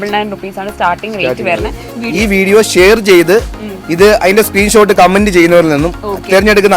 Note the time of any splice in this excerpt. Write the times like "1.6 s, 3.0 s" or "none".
2.0 s